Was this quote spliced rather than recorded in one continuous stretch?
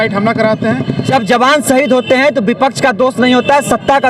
yes; 1 cut; at 1.1 s

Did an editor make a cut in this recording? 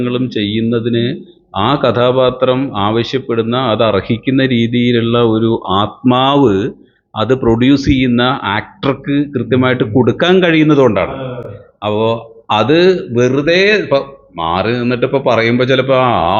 no; 0 cuts

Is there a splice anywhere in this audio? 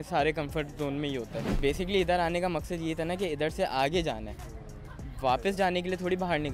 yes; 1 cut; at 1.5 s

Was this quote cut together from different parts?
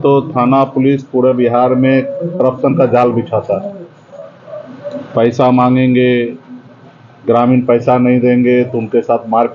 no; 0 cuts

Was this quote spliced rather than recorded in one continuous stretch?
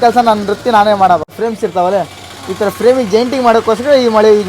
yes; 1 cut; at 1.3 s

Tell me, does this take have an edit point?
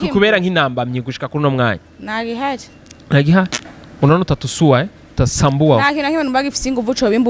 no; 0 cuts

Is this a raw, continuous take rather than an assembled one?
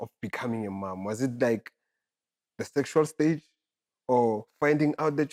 yes; 0 cuts

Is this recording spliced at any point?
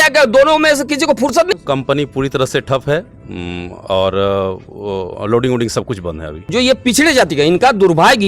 yes; 2 cuts; at 1.5 s, 6.5 s

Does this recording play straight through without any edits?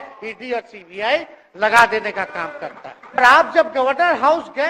no; 1 cut; at 3.2 s

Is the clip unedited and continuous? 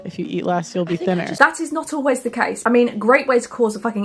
no; 2 cuts; at 1.3 s, 2.6 s

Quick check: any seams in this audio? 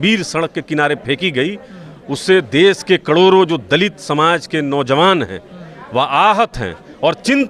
no; 0 cuts

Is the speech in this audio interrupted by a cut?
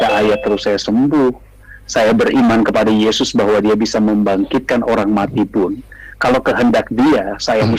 no; 0 cuts

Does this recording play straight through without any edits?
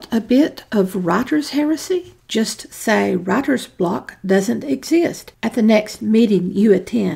no; 1 cut; at 1.7 s

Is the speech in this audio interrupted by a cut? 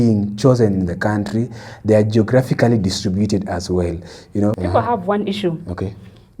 yes; 1 cut; at 4.6 s

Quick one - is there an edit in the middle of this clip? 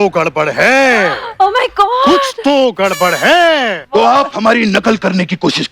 yes; 1 cut; at 3.8 s

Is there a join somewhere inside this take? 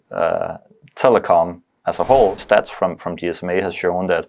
yes; 1 cut; at 2.4 s

